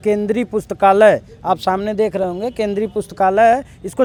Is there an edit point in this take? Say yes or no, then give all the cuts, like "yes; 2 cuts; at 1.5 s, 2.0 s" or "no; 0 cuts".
no; 0 cuts